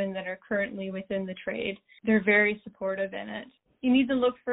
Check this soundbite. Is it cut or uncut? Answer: uncut